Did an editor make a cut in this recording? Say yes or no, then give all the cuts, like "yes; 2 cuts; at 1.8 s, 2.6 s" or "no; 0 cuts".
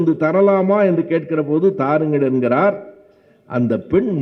no; 0 cuts